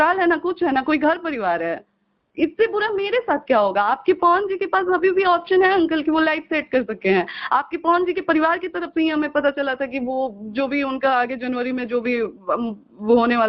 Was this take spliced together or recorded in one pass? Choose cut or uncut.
uncut